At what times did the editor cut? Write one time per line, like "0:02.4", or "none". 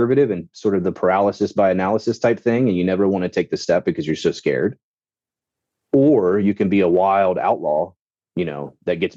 none